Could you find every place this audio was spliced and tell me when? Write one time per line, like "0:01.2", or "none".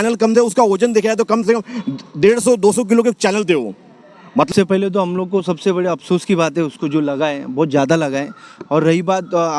0:04.5